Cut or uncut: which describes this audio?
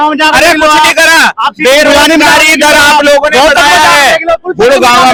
uncut